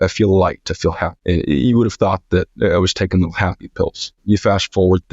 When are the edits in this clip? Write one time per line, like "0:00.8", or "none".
0:01.1
0:04.1